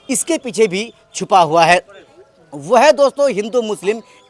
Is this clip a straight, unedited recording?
yes; 0 cuts

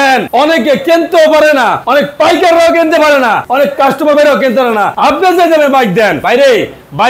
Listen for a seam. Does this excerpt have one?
yes; 4 cuts; at 1.8 s, 3.4 s, 4.9 s, 6.2 s

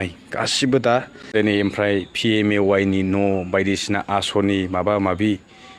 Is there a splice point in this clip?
yes; 1 cut; at 1.2 s

